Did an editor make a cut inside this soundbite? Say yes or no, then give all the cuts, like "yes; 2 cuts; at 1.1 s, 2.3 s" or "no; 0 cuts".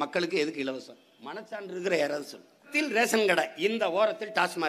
yes; 1 cut; at 2.7 s